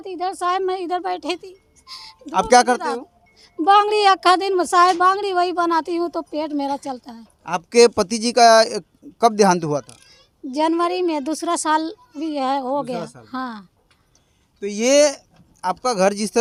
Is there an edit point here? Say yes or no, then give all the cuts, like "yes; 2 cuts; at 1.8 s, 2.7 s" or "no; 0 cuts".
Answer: no; 0 cuts